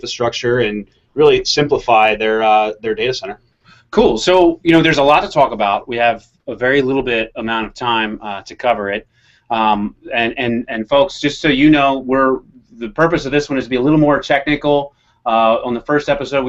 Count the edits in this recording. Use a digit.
1